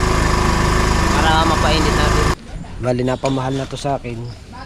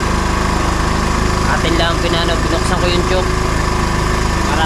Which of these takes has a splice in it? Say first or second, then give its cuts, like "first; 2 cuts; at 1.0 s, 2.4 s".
first; 1 cut; at 2.3 s